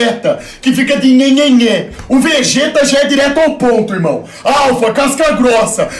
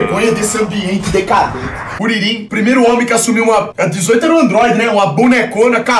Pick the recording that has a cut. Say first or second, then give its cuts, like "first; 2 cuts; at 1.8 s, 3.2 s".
second; 2 cuts; at 2.1 s, 3.7 s